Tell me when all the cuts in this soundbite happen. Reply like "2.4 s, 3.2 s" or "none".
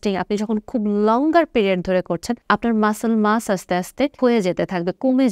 2.3 s, 4.1 s